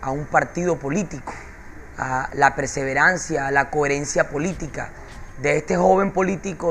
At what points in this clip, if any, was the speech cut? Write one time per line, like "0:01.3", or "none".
0:00.9